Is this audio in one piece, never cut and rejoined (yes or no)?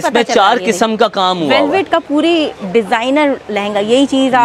yes